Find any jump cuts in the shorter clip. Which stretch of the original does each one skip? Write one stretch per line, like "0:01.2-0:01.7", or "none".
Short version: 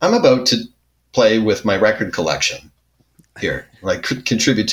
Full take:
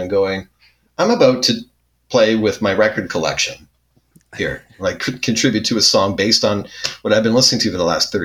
none

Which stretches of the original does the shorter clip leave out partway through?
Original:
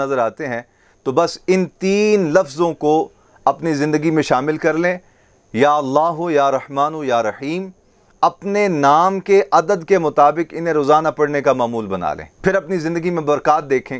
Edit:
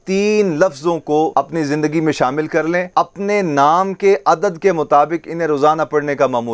0:03.0-0:03.4
0:05.0-0:08.1

